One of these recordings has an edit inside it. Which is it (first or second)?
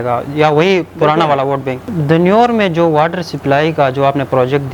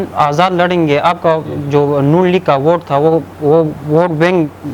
first